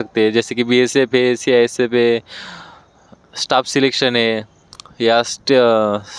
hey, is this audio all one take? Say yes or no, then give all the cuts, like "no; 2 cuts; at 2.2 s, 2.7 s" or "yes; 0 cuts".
yes; 0 cuts